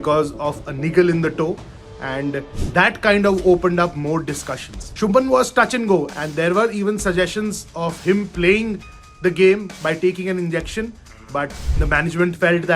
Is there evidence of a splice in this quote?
yes; 2 cuts; at 4.9 s, 6.1 s

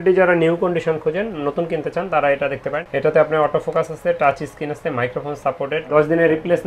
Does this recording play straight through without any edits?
no; 2 cuts; at 2.8 s, 5.9 s

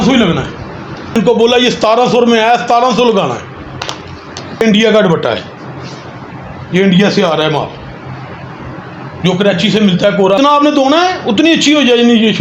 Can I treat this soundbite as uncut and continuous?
no; 3 cuts; at 1.1 s, 4.6 s, 10.4 s

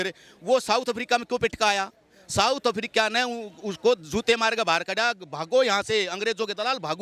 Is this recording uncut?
yes; 0 cuts

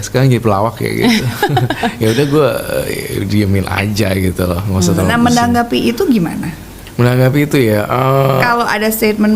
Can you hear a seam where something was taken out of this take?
no; 0 cuts

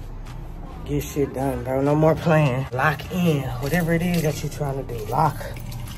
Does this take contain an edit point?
yes; 1 cut; at 2.7 s

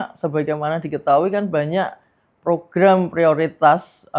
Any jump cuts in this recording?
no; 0 cuts

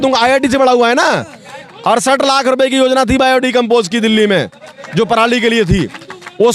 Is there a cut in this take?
no; 0 cuts

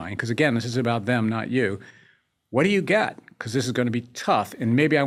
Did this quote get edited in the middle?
no; 0 cuts

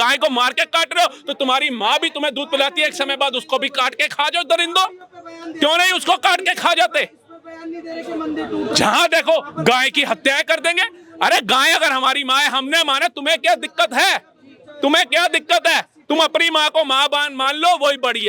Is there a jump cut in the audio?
no; 0 cuts

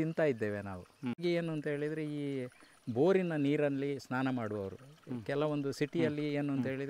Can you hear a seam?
yes; 1 cut; at 1.2 s

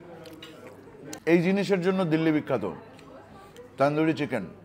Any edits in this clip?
yes; 1 cut; at 1.2 s

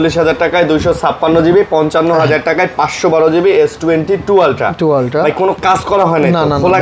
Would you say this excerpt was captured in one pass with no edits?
yes; 0 cuts

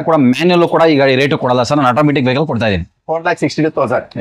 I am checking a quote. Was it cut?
no; 0 cuts

